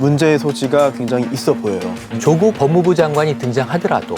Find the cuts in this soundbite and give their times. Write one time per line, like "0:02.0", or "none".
0:02.2